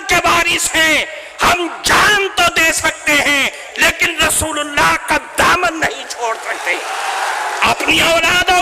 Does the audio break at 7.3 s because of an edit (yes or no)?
yes